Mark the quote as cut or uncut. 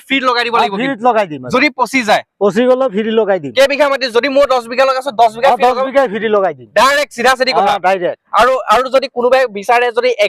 uncut